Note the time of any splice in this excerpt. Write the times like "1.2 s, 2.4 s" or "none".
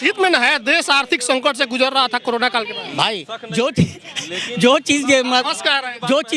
none